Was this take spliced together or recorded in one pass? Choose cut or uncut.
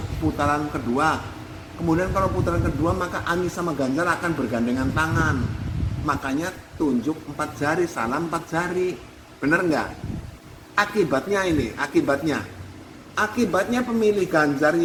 uncut